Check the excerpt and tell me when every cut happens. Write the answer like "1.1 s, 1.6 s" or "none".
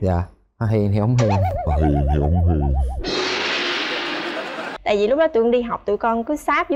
4.7 s